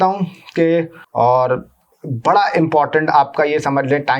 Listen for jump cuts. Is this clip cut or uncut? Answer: cut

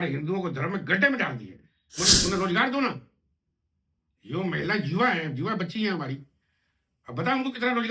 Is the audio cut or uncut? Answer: cut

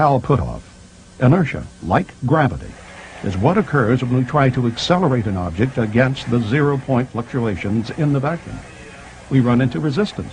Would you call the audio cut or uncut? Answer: cut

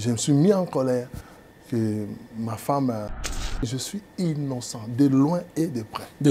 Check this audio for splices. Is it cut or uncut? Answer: cut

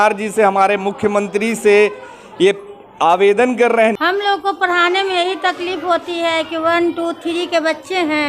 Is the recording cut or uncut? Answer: cut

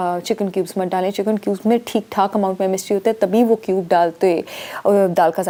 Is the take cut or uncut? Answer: uncut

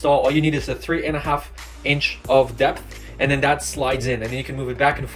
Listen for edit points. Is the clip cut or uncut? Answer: uncut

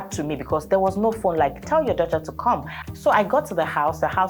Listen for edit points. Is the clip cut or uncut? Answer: cut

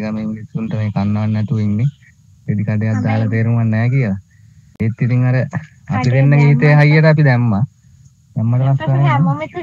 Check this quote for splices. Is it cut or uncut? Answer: uncut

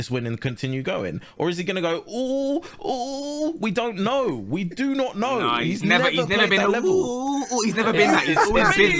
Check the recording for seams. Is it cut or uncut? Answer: uncut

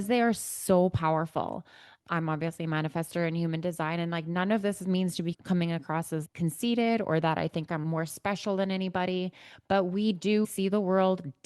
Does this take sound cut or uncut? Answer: uncut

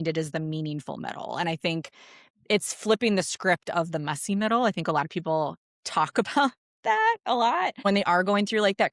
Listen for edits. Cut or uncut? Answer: cut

